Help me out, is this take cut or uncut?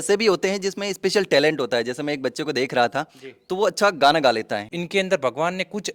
cut